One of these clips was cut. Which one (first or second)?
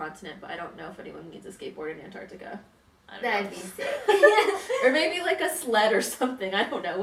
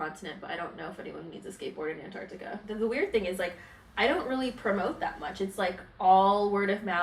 second